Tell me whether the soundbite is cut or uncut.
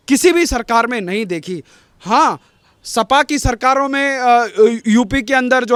uncut